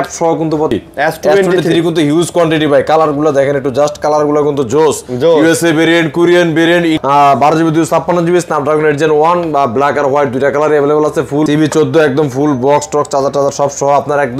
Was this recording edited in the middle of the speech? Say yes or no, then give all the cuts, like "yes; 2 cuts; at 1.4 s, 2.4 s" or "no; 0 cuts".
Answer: yes; 3 cuts; at 0.7 s, 7.0 s, 11.5 s